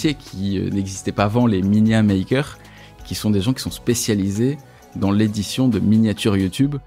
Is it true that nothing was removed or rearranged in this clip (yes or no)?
yes